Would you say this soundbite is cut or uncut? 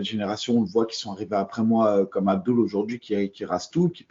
uncut